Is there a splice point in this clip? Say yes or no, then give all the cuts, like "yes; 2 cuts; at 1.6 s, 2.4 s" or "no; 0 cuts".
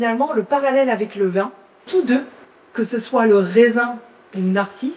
yes; 1 cut; at 1.9 s